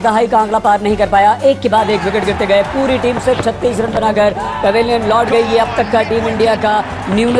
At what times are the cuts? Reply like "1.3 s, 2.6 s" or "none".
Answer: none